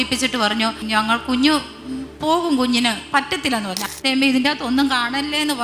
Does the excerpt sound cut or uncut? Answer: cut